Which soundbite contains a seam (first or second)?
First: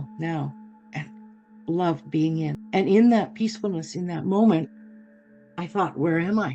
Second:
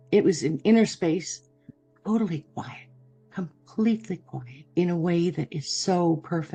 first